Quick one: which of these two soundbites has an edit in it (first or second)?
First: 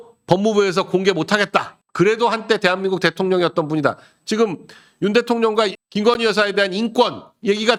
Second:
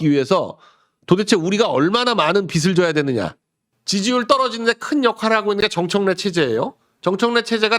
second